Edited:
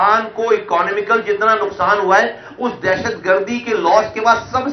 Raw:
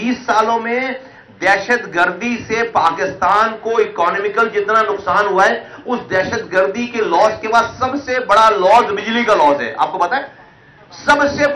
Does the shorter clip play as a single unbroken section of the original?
yes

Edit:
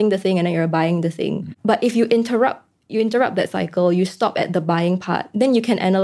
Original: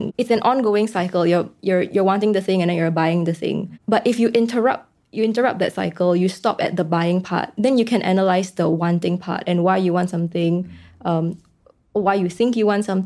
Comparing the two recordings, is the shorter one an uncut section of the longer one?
yes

